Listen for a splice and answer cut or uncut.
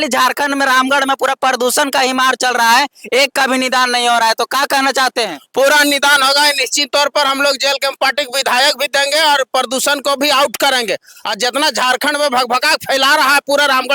uncut